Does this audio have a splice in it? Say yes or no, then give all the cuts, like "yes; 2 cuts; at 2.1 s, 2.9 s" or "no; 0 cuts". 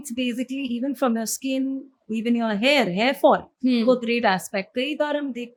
no; 0 cuts